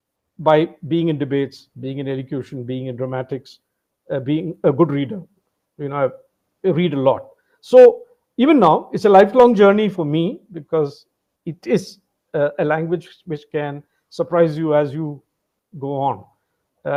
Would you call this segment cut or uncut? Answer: uncut